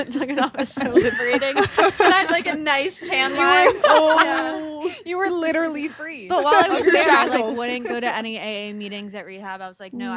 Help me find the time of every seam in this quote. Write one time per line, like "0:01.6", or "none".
none